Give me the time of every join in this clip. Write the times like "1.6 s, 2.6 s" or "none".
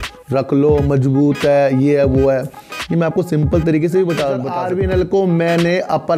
4.6 s